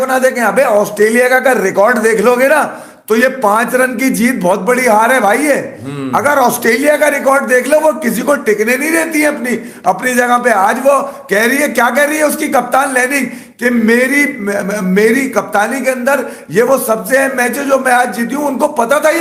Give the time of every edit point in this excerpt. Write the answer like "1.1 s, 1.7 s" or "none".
none